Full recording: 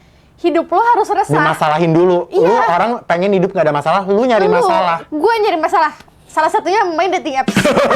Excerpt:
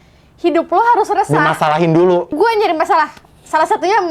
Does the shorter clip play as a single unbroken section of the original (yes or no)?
no